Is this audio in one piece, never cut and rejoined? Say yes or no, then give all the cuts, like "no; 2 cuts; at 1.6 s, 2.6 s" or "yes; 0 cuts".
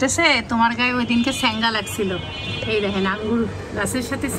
yes; 0 cuts